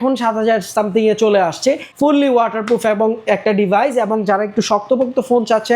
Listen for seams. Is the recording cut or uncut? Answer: cut